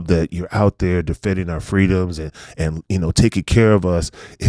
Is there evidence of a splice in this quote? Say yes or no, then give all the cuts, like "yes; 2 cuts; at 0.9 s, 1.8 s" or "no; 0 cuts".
no; 0 cuts